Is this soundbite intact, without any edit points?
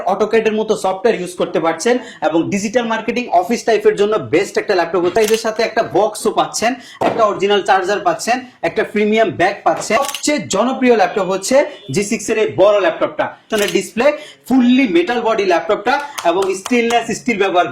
no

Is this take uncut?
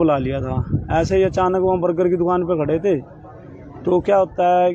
yes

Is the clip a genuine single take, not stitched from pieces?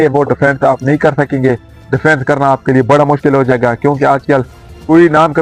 yes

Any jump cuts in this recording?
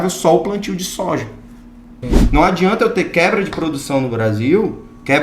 yes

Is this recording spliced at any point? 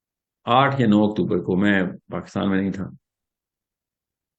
no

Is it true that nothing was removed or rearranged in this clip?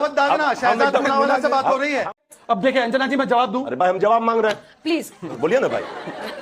no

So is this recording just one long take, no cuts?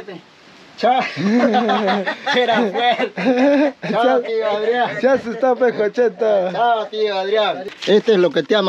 no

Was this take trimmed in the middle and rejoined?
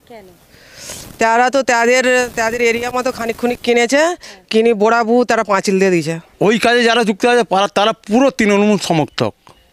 yes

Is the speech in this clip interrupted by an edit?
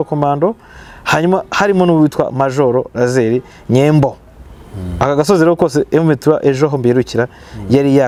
no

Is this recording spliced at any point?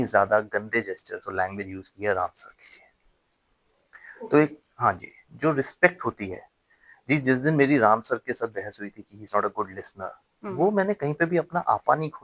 no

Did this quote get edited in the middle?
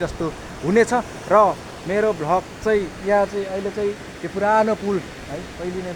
no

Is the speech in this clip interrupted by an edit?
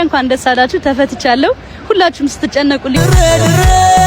yes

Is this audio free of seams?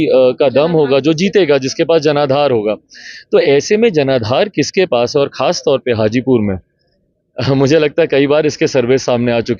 yes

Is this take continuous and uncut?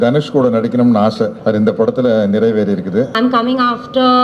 no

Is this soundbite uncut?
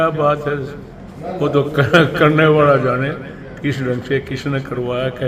yes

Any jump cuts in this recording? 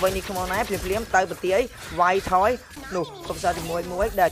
yes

